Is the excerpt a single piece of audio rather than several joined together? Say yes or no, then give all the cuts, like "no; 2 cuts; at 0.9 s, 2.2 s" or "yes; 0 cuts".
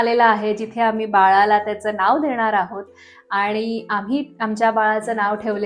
yes; 0 cuts